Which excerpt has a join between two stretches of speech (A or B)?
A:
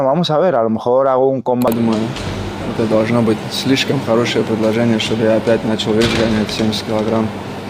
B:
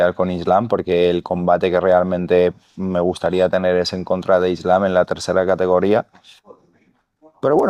A